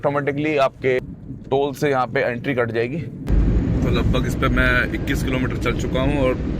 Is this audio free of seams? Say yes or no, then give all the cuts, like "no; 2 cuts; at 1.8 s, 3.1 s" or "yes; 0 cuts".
no; 2 cuts; at 1.6 s, 3.2 s